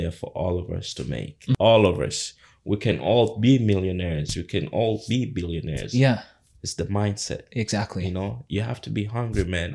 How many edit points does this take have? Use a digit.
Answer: 1